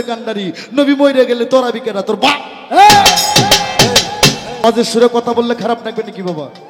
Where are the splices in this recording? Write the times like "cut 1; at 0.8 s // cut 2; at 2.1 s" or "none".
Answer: cut 1; at 4.6 s